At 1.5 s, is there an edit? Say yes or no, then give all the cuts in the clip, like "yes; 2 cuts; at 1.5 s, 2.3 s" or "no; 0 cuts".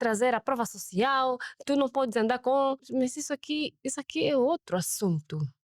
no; 1 cut; at 2.8 s